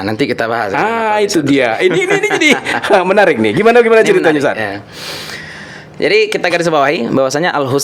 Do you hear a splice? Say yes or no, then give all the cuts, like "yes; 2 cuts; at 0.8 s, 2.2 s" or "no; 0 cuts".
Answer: no; 0 cuts